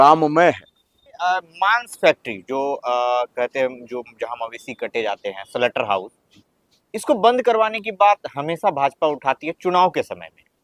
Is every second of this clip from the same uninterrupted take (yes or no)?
no